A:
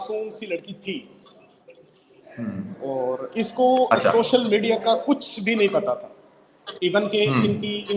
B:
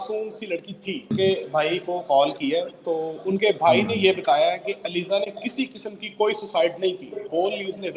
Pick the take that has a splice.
B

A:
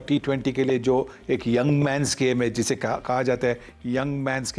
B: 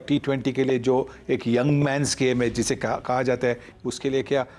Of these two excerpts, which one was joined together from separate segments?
B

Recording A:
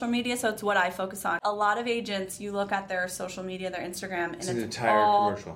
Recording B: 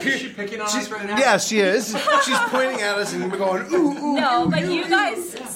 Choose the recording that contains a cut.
A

